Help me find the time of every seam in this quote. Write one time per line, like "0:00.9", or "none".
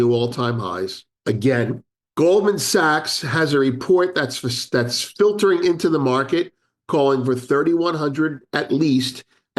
0:01.9